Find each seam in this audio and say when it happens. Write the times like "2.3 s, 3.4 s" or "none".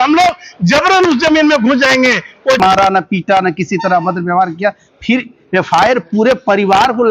2.6 s